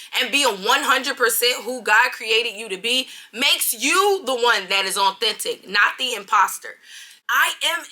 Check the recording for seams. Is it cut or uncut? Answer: cut